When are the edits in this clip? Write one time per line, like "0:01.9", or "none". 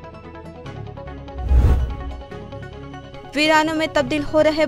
0:02.6